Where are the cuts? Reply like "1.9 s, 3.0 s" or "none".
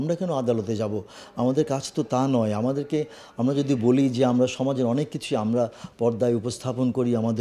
none

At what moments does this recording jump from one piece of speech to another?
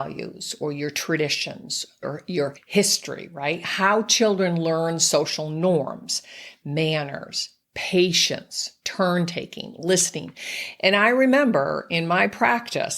2.4 s

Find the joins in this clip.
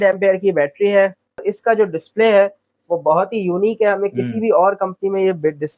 1.5 s

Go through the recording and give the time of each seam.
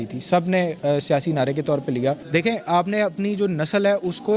2.2 s

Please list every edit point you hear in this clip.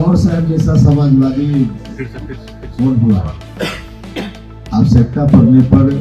none

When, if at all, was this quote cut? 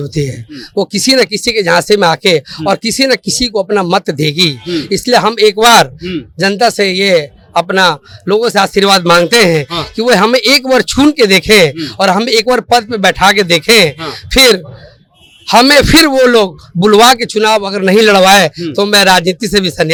none

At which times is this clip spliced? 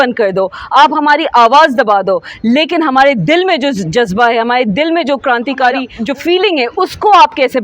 5.9 s

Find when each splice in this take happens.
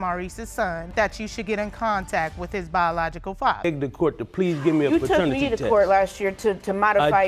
0.9 s, 3.6 s

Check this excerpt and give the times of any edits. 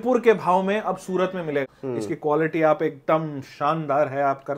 1.6 s

